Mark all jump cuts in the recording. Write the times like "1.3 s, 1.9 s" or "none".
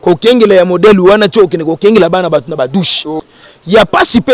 3.1 s